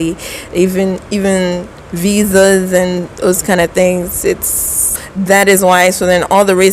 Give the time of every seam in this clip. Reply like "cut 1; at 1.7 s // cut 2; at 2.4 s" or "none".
cut 1; at 5.0 s